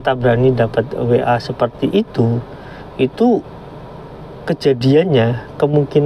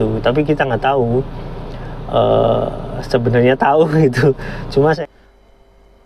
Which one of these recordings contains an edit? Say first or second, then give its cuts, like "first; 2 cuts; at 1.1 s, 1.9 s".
second; 1 cut; at 5.0 s